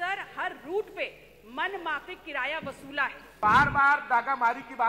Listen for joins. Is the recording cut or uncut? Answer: cut